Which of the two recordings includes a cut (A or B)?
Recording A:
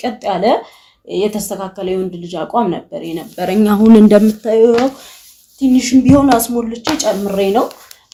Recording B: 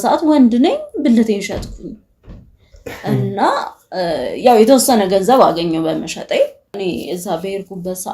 B